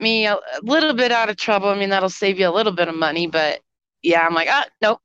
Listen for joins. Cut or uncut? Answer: uncut